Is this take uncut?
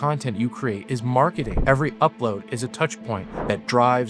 no; 1 cut; at 1.5 s

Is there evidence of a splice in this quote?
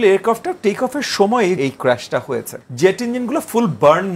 yes; 2 cuts; at 1.6 s, 2.6 s

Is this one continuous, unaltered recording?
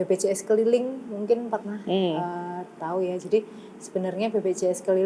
yes; 0 cuts

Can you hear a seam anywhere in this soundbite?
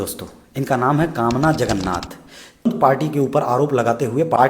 yes; 1 cut; at 2.7 s

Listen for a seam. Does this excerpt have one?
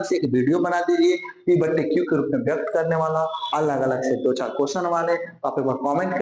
no; 0 cuts

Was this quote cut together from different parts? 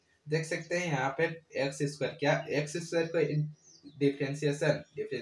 no; 0 cuts

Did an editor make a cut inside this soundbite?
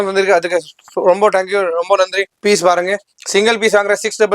yes; 1 cut; at 2.3 s

